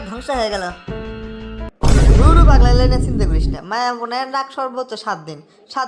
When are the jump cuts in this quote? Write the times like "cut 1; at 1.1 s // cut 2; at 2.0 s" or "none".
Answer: none

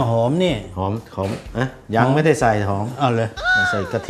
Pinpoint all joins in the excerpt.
none

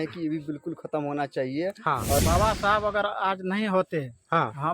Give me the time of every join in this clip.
cut 1; at 2.2 s

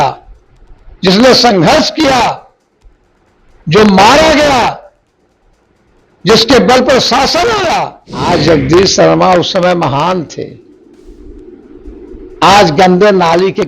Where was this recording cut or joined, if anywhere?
cut 1; at 8.2 s

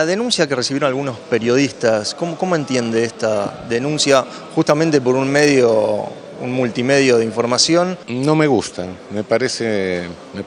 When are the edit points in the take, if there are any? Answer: none

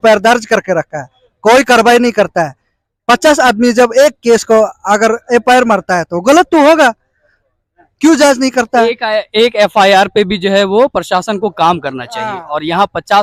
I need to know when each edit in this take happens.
none

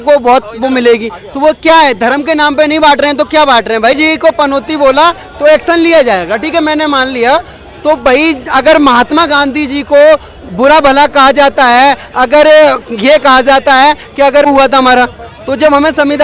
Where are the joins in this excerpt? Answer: cut 1; at 4.0 s // cut 2; at 14.4 s

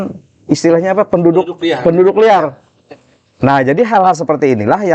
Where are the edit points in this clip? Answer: none

